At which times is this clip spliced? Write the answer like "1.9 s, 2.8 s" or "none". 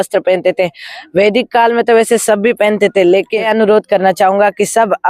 3.5 s